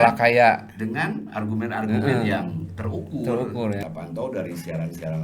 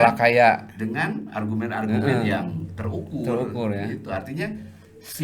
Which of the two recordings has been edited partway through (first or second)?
first